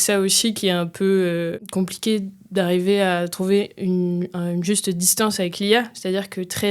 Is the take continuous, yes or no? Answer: no